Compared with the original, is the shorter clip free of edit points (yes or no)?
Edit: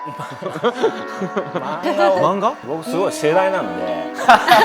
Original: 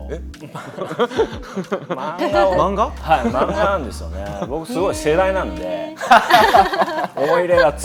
no